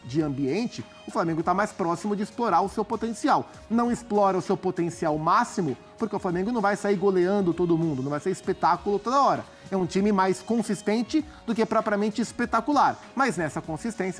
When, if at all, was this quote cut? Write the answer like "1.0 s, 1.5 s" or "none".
none